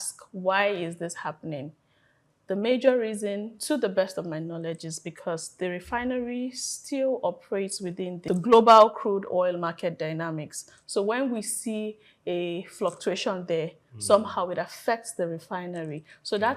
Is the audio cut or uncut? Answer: cut